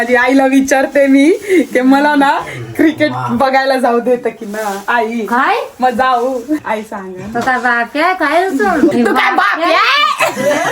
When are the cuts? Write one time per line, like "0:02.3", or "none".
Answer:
0:06.6
0:08.9